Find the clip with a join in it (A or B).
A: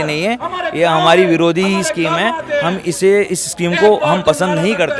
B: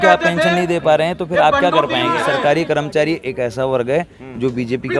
B